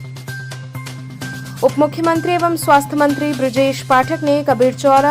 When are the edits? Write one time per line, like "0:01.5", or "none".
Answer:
0:01.0